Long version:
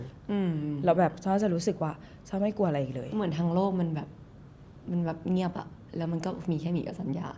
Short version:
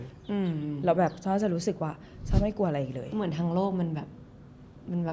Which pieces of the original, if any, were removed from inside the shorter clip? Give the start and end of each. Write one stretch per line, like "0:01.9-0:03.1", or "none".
none